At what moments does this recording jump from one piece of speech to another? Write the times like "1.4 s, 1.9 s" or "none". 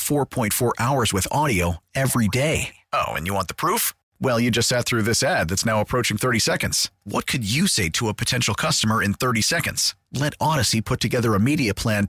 none